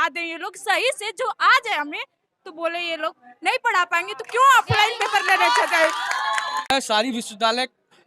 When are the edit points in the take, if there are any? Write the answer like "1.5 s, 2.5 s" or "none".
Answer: 6.7 s